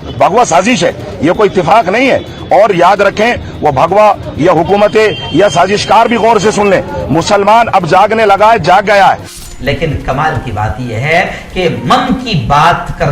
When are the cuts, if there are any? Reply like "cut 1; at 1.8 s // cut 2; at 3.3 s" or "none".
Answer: cut 1; at 9.4 s